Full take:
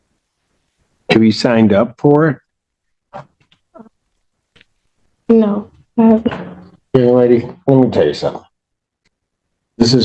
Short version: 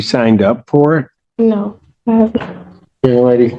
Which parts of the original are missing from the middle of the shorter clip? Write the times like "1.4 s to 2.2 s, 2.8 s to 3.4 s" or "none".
2.5 s to 5.1 s